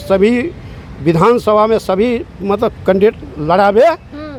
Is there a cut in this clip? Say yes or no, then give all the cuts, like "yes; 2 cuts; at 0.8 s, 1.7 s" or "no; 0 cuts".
no; 0 cuts